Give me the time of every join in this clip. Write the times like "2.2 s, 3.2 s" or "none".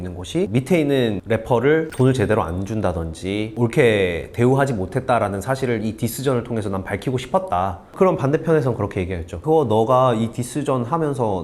7.8 s, 9.4 s